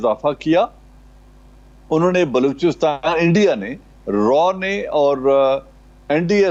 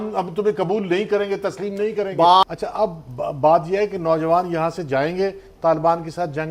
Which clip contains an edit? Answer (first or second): second